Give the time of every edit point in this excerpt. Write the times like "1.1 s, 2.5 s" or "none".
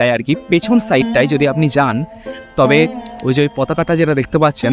3.1 s